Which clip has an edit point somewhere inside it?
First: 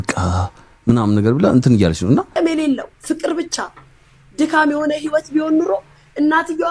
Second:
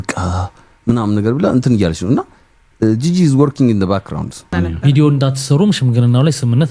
first; 1 cut; at 2.3 s

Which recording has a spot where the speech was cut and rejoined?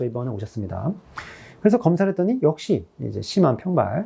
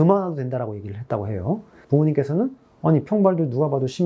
second; 1 cut; at 1.7 s

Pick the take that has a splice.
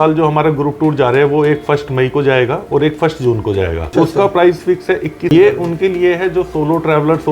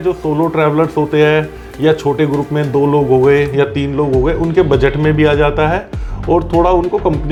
first; 2 cuts; at 3.9 s, 5.3 s

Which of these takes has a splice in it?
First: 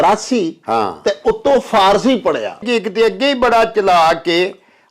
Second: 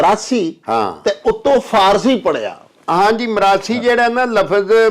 first; 1 cut; at 2.6 s

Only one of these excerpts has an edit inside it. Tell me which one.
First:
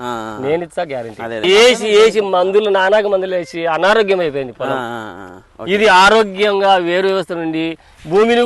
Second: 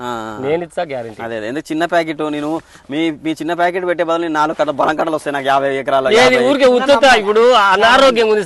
first; 1 cut; at 1.4 s

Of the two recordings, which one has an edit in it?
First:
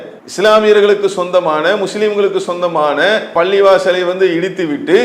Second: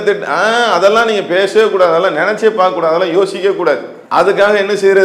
second; 1 cut; at 3.9 s

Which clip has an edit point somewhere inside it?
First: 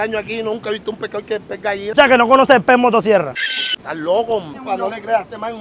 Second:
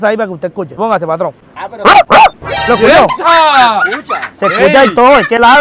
first; 3 cuts; at 1.9 s, 3.7 s, 4.6 s

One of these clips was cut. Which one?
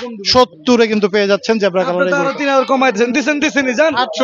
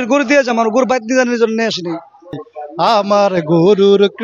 second; 1 cut; at 2.3 s

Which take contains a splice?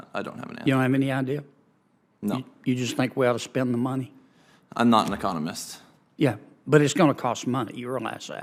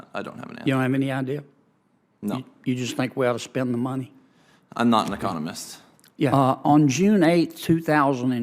second; 1 cut; at 6.3 s

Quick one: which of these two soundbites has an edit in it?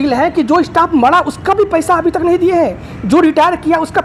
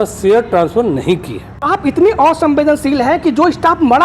second; 1 cut; at 1.6 s

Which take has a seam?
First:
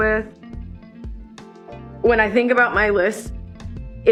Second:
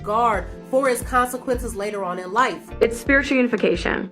second; 1 cut; at 2.7 s

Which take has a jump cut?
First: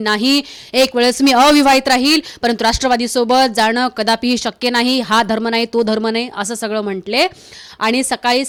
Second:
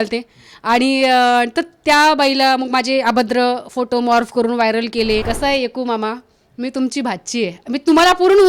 second; 1 cut; at 5.3 s

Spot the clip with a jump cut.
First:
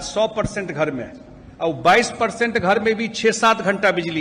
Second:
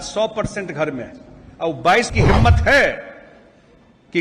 second; 1 cut; at 2.1 s

